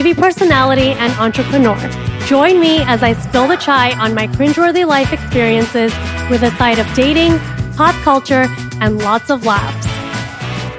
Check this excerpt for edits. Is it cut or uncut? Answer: uncut